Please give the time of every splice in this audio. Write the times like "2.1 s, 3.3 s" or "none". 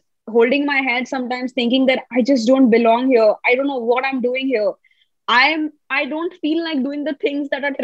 none